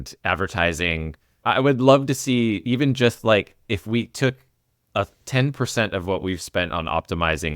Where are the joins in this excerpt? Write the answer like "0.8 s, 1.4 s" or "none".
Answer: 1.4 s